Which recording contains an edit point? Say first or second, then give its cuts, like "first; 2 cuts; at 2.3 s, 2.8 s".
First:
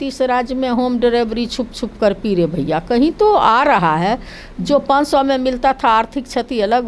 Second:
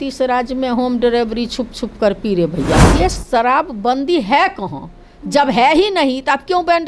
second; 1 cut; at 2.8 s